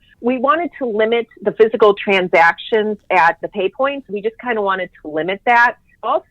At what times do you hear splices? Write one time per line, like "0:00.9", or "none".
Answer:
0:04.1